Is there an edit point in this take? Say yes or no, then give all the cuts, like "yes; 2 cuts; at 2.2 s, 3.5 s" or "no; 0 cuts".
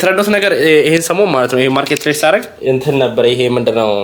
yes; 1 cut; at 2.5 s